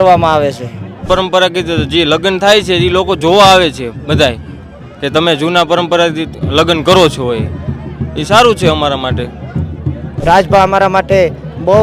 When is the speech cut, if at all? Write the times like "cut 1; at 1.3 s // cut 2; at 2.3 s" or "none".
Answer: cut 1; at 1.1 s // cut 2; at 10.1 s